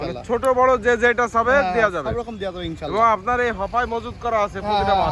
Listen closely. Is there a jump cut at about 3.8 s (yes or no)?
no